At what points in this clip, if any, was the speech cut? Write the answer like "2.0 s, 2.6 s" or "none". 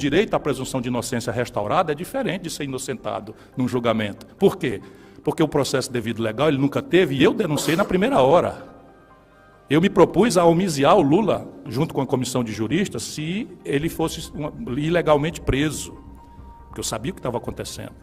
none